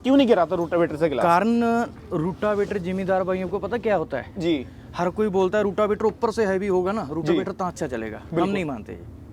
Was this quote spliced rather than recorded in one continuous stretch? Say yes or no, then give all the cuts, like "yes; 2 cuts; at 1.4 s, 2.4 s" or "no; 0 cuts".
no; 0 cuts